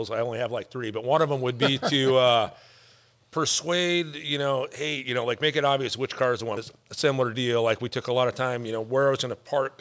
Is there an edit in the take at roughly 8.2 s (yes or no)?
no